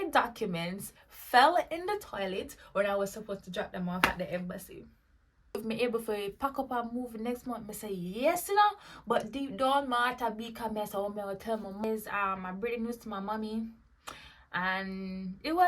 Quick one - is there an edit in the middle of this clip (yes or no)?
yes